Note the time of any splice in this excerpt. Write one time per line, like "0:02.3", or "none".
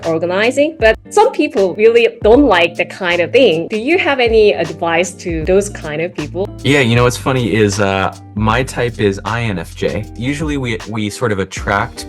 0:01.9
0:03.3
0:05.4
0:10.1

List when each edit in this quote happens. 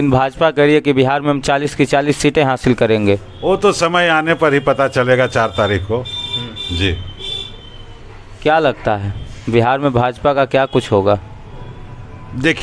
none

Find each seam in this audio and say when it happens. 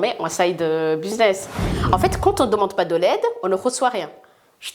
0:01.7

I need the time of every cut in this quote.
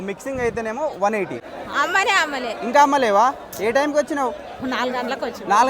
0:01.4

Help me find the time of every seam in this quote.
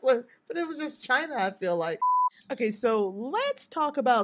0:02.1

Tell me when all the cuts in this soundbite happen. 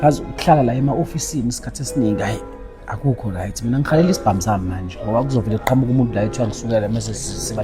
none

